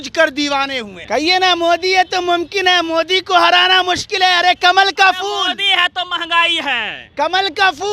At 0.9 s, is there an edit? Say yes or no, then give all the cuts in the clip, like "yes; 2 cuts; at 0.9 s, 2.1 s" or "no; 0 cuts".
yes; 1 cut; at 0.9 s